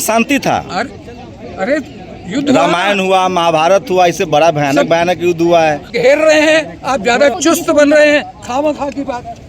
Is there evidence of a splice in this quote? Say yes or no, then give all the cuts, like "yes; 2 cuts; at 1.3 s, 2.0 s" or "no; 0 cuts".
yes; 1 cut; at 5.9 s